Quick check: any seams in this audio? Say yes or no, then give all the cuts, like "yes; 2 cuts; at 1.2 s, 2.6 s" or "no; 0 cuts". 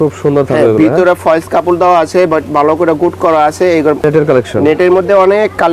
yes; 1 cut; at 4.0 s